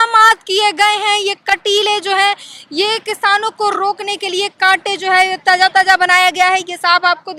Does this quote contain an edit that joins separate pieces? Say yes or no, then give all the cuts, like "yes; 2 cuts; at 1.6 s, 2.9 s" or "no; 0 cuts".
no; 0 cuts